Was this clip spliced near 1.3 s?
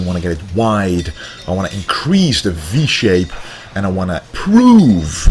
no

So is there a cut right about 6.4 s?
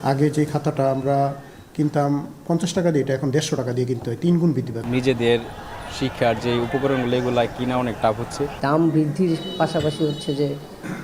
no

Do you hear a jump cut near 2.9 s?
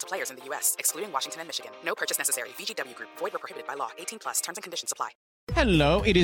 no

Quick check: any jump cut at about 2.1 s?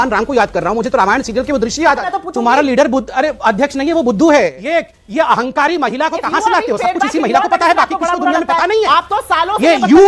yes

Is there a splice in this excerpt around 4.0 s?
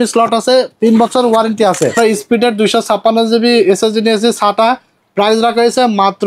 no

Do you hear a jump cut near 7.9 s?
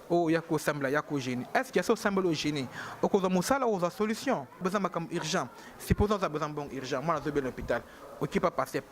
no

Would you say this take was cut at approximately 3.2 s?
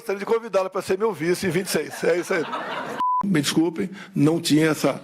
yes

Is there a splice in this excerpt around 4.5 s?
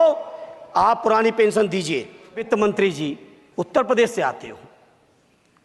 no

